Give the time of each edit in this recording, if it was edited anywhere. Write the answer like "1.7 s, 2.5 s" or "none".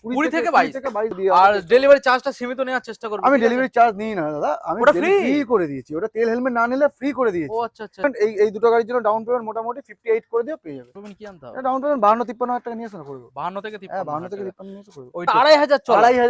1.1 s, 8.0 s, 11.0 s, 15.3 s